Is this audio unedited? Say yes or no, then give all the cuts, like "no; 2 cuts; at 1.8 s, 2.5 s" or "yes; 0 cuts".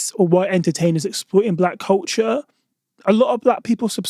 yes; 0 cuts